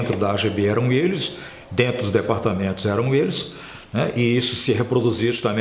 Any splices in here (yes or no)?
no